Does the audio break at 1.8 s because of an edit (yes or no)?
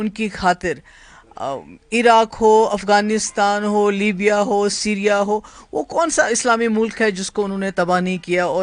no